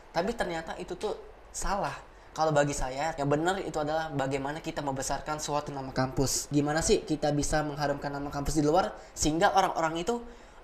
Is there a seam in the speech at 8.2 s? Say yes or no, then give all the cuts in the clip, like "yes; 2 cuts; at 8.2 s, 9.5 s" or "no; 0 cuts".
no; 2 cuts; at 3.1 s, 6.4 s